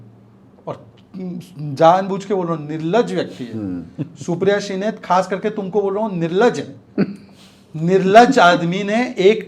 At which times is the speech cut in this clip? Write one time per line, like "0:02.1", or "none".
none